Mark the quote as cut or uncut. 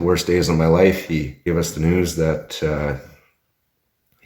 cut